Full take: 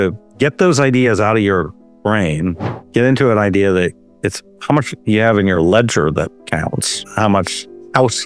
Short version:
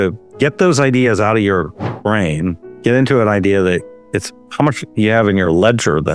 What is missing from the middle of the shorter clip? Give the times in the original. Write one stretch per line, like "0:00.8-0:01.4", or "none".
0:02.7-0:02.8